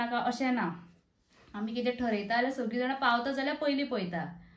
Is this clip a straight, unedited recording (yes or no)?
yes